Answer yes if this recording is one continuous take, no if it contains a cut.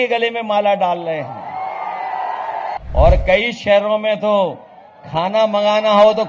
no